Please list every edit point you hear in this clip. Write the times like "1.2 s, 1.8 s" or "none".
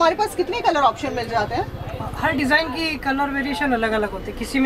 none